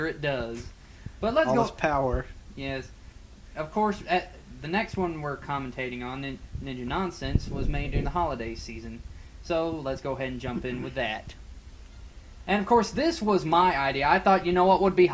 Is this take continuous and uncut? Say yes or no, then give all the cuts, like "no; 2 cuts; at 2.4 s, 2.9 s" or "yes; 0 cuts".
no; 1 cut; at 10.8 s